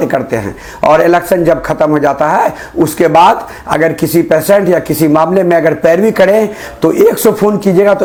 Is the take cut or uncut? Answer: uncut